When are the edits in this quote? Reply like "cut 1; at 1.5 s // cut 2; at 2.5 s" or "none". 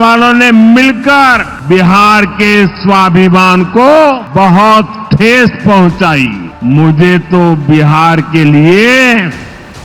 cut 1; at 1.5 s // cut 2; at 4.2 s // cut 3; at 6.5 s